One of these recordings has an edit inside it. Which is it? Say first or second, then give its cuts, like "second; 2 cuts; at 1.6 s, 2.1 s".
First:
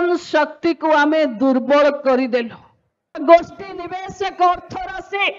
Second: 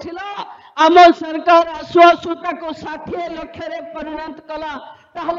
first; 1 cut; at 3.1 s